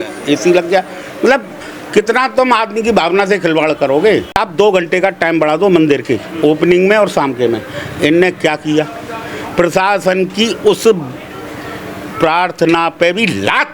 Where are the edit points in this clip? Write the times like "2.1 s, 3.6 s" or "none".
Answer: 4.4 s